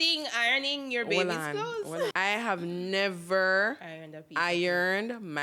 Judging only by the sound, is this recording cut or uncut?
cut